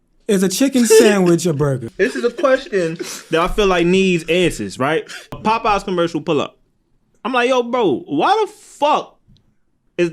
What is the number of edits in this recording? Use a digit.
2